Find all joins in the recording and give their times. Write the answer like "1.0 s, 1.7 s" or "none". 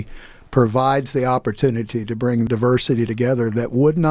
2.5 s